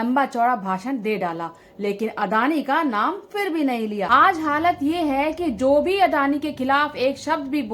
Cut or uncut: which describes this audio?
cut